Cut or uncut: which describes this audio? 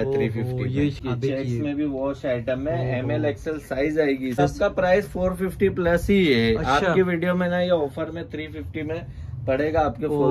cut